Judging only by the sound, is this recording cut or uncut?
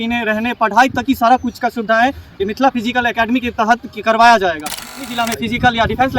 cut